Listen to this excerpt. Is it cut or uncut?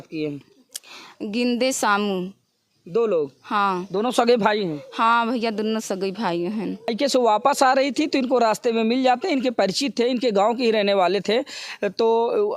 cut